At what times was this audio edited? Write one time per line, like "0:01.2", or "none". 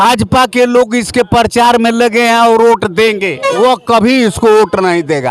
0:03.6